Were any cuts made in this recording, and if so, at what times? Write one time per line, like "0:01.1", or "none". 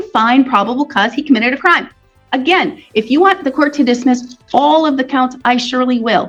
none